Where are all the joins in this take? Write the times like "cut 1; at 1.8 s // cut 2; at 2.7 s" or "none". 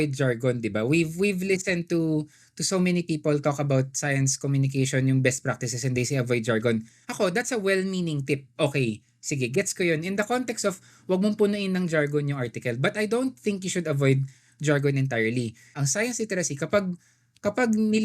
cut 1; at 15.6 s